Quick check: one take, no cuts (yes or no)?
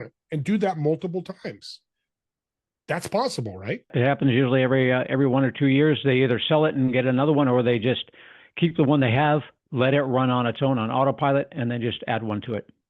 no